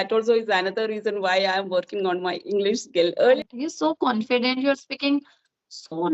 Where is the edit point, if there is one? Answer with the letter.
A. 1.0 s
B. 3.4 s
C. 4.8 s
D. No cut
B